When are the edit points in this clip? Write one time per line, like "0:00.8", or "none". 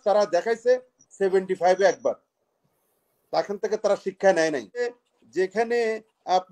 0:05.0